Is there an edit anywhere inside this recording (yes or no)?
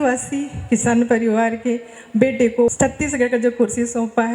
yes